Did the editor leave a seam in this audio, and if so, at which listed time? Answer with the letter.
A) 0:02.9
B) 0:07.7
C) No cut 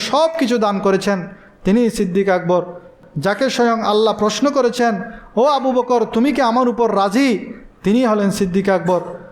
A